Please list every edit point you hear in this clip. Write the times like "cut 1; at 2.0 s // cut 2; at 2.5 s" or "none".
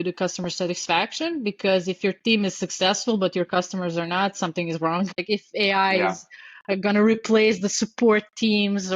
cut 1; at 5.1 s